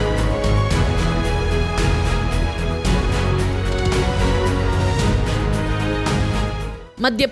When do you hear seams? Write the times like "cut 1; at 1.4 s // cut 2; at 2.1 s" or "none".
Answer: none